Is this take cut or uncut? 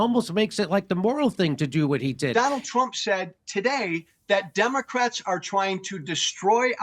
cut